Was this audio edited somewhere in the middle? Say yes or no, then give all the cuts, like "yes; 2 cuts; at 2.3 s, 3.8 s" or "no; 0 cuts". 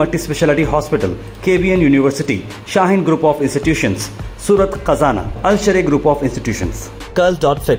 no; 0 cuts